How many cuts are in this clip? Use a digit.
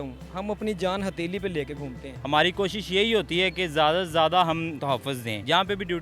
2